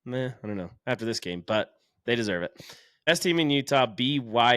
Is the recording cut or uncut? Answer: cut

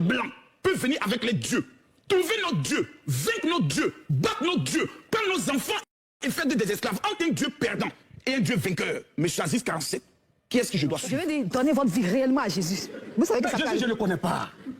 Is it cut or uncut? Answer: cut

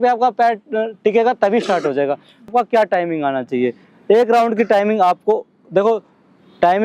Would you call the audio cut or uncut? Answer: cut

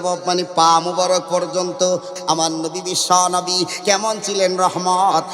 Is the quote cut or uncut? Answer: cut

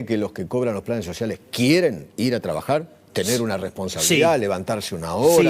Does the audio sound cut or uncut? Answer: uncut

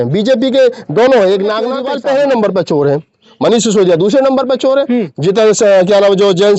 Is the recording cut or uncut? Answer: cut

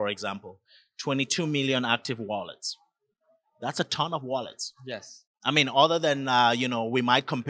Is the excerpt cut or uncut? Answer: uncut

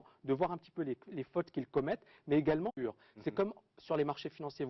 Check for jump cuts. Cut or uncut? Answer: uncut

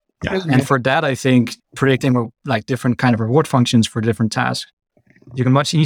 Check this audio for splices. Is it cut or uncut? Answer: uncut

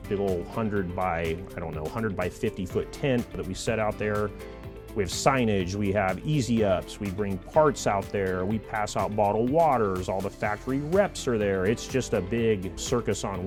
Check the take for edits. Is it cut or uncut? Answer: uncut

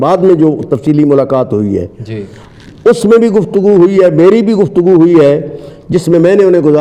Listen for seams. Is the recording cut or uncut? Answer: uncut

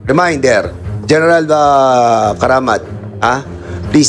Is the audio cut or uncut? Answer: uncut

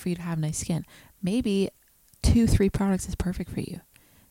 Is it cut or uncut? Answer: uncut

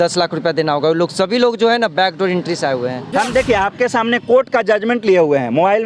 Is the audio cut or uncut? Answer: cut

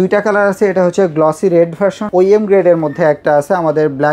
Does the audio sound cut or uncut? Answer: cut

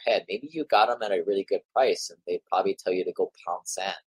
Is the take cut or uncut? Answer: uncut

